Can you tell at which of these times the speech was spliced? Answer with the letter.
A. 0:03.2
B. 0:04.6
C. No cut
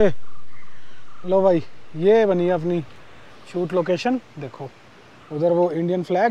C